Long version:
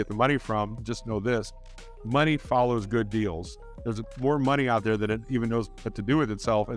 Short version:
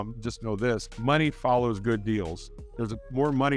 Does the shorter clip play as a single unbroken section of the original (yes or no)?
no